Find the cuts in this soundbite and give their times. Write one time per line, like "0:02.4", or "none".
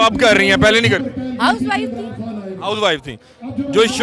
none